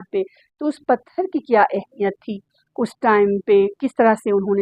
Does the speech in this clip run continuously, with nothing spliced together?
yes; 0 cuts

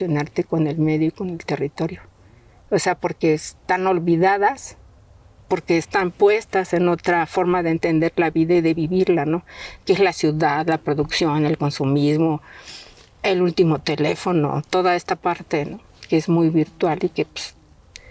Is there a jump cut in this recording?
no; 0 cuts

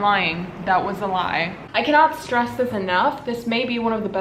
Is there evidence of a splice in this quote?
yes; 1 cut; at 1.6 s

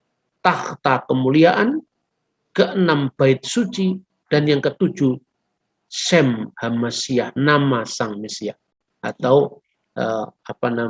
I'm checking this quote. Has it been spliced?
no; 0 cuts

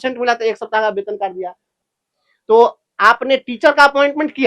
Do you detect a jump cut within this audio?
yes; 1 cut; at 1.7 s

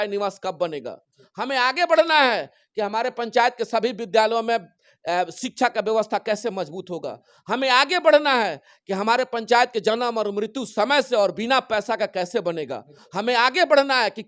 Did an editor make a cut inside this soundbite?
no; 0 cuts

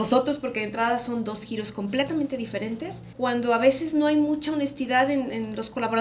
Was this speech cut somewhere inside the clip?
yes; 1 cut; at 3.0 s

